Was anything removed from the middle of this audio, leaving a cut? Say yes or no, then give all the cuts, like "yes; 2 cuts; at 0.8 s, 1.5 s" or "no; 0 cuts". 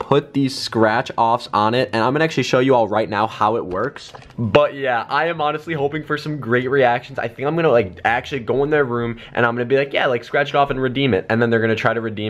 no; 0 cuts